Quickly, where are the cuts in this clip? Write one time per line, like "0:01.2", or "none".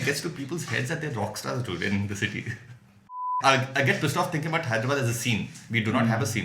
0:03.4